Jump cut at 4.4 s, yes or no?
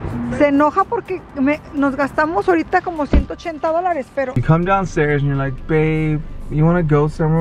yes